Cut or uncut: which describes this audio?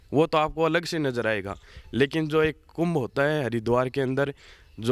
uncut